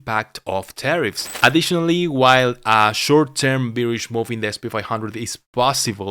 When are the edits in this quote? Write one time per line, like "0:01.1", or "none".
0:01.2